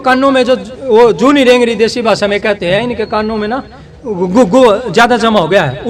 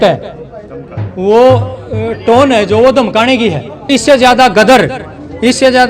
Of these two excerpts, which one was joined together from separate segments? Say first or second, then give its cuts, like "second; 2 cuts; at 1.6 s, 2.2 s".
second; 1 cut; at 3.9 s